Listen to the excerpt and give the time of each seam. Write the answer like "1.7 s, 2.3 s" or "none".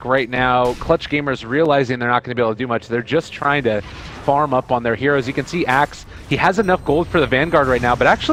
none